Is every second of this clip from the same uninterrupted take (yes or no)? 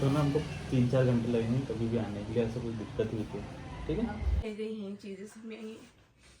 no